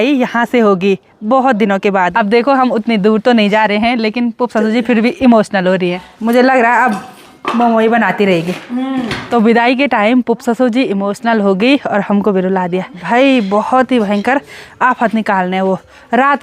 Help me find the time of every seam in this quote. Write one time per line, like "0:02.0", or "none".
0:02.2
0:06.1
0:09.2
0:13.0